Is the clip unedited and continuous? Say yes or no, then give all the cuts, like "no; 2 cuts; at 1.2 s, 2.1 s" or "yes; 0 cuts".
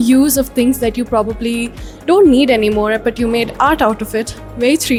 yes; 0 cuts